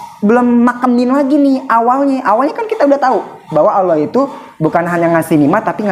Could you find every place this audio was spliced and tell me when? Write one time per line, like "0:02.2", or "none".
none